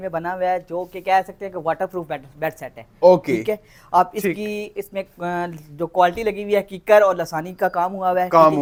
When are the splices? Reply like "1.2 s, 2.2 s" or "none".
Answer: none